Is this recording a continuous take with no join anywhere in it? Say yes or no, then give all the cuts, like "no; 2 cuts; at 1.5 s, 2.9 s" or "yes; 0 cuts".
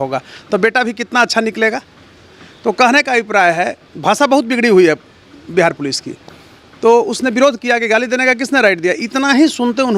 yes; 0 cuts